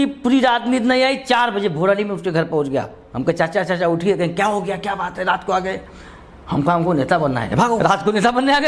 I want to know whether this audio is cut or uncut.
cut